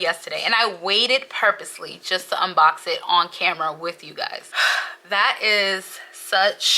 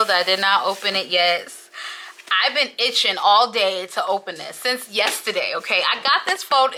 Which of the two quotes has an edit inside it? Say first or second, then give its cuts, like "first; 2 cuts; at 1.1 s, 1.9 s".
first; 1 cut; at 4.4 s